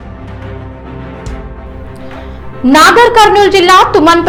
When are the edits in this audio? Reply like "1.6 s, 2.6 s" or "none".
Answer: none